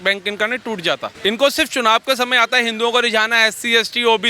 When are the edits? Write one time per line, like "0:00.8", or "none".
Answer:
0:01.1